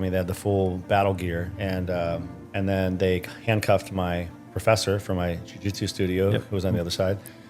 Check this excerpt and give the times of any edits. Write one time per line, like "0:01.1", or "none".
0:02.4